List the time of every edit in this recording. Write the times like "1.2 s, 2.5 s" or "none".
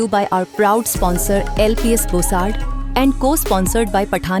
none